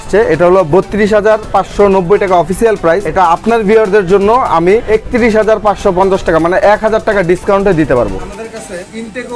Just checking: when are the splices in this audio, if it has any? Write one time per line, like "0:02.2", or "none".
0:04.8
0:08.1